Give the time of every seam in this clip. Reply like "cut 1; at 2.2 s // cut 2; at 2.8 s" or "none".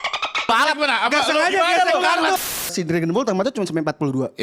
cut 1; at 2.7 s